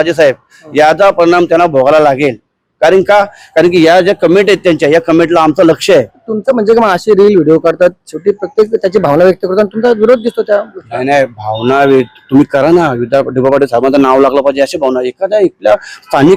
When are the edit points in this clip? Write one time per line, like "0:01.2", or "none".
none

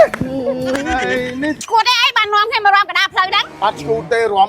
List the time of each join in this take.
0:01.6

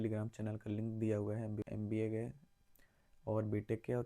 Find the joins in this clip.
0:01.6

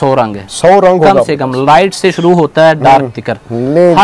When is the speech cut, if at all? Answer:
none

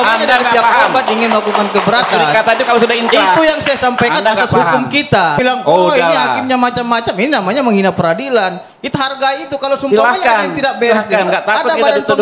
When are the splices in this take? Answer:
0:05.4

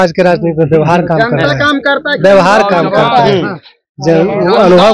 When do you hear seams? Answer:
none

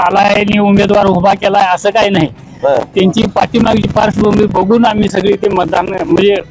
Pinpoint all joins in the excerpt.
none

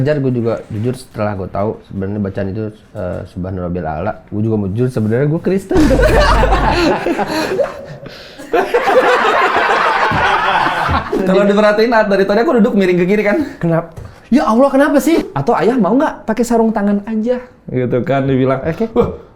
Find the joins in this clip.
0:11.2
0:15.3

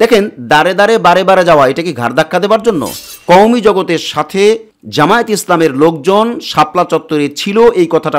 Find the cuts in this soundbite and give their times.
0:03.1

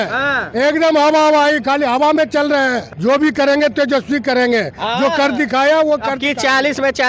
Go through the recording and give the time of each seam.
0:02.9

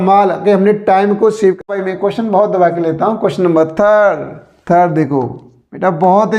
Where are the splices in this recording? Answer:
0:01.7

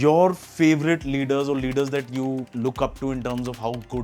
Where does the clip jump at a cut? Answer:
0:02.5

